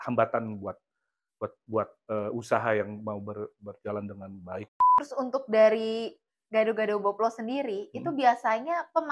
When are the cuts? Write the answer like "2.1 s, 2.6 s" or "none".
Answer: 4.8 s

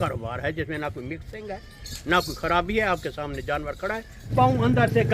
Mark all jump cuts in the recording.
4.2 s

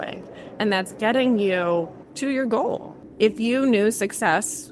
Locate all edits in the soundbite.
2.0 s, 3.0 s

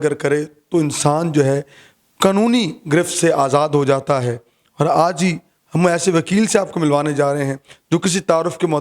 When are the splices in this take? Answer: none

